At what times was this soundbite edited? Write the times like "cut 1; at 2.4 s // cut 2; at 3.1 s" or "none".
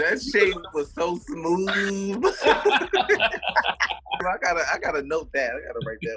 cut 1; at 4.2 s